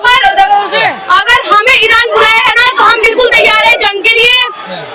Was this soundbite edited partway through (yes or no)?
no